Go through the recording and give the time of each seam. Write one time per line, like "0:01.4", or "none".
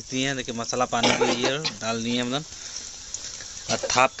none

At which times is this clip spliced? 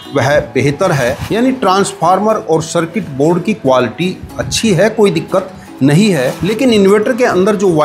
0:01.2

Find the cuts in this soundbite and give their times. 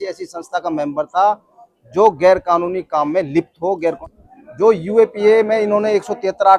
0:04.0

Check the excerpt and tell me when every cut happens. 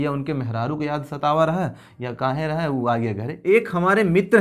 0:03.3

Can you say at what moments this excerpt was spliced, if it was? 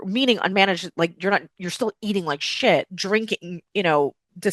0:02.9

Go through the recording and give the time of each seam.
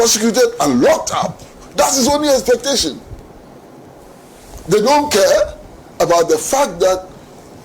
none

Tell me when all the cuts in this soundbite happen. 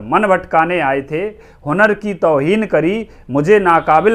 0:01.5

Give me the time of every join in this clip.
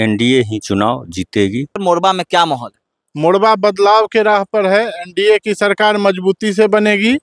0:01.8

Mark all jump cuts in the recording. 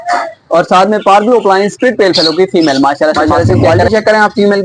0:03.7

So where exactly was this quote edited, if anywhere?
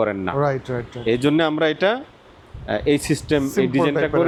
none

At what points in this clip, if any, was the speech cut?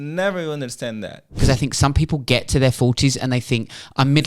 0:01.3

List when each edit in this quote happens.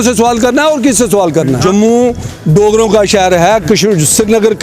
0:01.6

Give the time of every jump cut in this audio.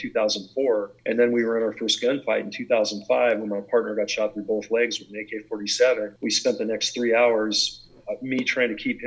0:00.9
0:06.1

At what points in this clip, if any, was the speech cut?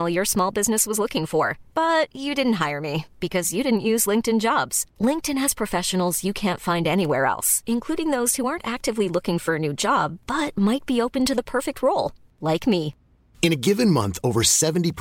none

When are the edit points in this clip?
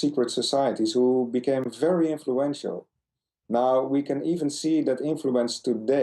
0:04.9

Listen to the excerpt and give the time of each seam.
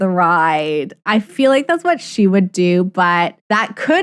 none

